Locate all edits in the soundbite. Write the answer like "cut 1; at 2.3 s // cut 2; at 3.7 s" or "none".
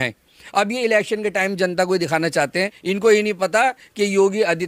none